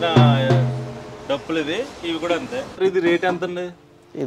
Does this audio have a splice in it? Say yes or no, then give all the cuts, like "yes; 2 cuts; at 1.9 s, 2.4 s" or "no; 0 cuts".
yes; 1 cut; at 2.8 s